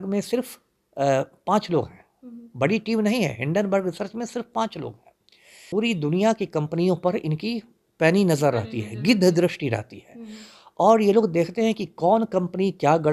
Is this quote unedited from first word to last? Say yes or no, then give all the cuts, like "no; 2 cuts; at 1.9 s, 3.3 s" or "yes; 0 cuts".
no; 1 cut; at 5.5 s